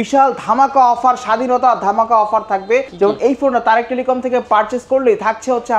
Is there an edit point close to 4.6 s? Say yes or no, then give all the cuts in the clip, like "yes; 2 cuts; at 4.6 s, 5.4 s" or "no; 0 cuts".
no; 1 cut; at 2.9 s